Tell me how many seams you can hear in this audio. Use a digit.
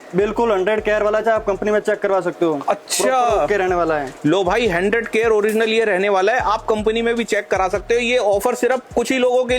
0